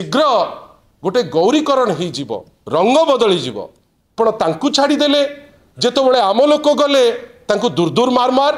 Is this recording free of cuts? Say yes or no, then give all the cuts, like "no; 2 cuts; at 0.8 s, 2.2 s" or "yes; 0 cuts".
no; 1 cut; at 4.1 s